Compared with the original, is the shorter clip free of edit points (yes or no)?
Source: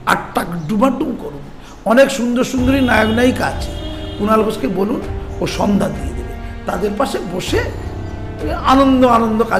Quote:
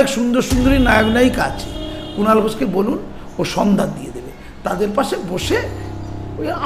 yes